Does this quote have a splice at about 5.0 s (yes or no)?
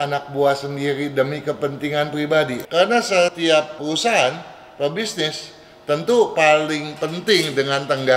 no